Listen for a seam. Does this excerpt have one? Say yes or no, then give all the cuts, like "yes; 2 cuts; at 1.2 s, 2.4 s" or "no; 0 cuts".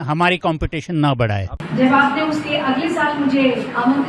yes; 1 cut; at 1.5 s